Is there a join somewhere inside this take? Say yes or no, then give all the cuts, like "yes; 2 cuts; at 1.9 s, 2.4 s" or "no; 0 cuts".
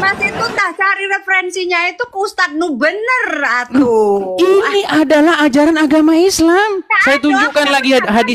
no; 0 cuts